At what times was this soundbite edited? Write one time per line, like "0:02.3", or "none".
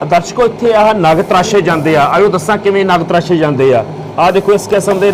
none